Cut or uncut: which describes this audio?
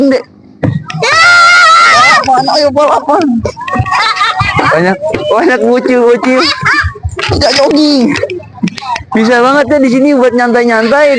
uncut